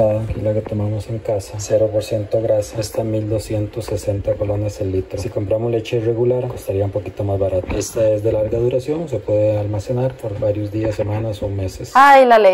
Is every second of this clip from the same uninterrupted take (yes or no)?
yes